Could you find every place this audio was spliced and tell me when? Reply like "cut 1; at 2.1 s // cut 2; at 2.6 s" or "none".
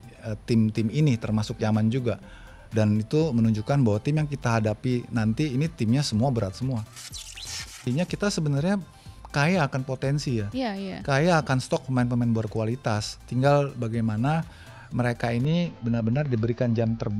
cut 1; at 7.5 s